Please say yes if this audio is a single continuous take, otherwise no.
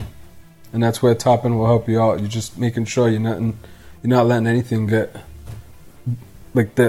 yes